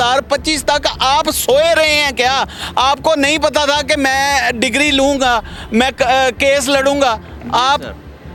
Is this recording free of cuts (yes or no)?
yes